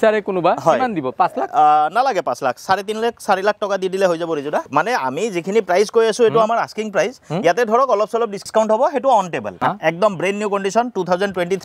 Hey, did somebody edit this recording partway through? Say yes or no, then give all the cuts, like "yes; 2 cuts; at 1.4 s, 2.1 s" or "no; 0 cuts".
yes; 3 cuts; at 4.7 s, 8.4 s, 9.5 s